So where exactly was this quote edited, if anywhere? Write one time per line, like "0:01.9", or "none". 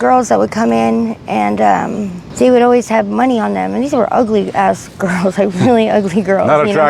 none